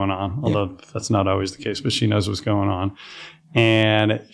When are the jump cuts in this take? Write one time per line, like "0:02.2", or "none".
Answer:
none

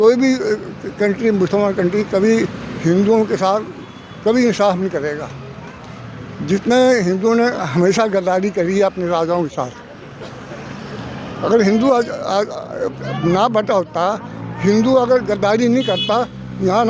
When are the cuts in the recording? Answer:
none

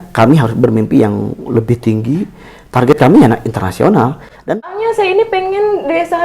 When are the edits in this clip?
0:04.3

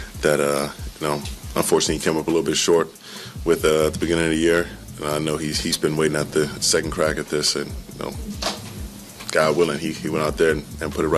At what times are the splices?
none

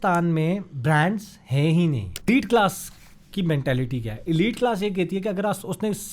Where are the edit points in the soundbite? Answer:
0:02.3

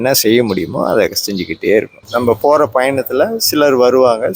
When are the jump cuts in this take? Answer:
0:02.0

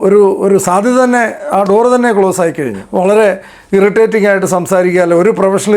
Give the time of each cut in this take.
0:02.8

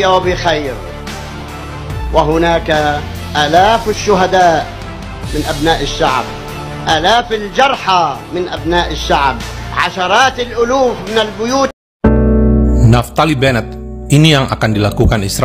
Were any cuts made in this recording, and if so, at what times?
0:11.7

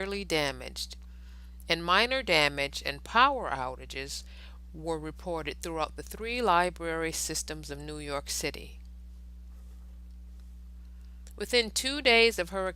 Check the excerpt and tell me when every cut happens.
0:02.5

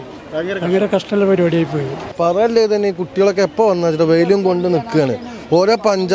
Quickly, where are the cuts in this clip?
0:02.1

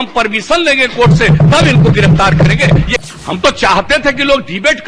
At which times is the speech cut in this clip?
0:02.9

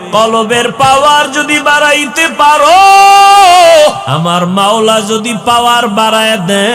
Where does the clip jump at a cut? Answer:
0:04.1

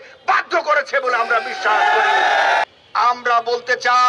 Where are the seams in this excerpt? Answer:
0:02.6

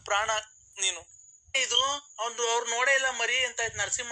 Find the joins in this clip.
0:01.5

